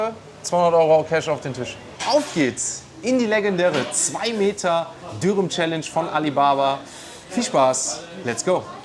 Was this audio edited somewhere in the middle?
yes; 1 cut; at 1.9 s

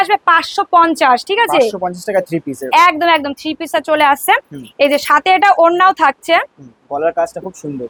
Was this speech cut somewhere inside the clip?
no; 0 cuts

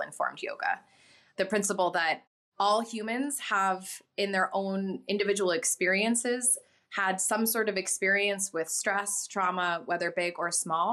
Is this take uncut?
no; 1 cut; at 1.2 s

